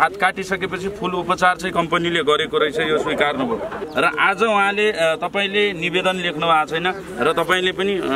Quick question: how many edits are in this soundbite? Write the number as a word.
one